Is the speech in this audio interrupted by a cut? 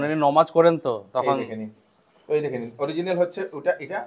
no; 0 cuts

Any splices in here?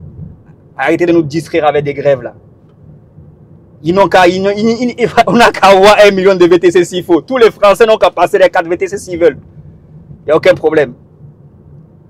no; 0 cuts

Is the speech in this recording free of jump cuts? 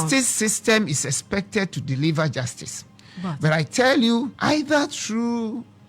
yes; 0 cuts

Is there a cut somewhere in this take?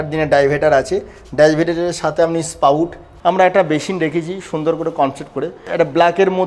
yes; 1 cut; at 3.0 s

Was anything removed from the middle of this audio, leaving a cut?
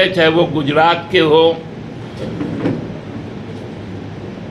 no; 0 cuts

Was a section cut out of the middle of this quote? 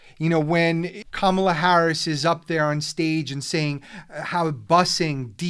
yes; 1 cut; at 1.0 s

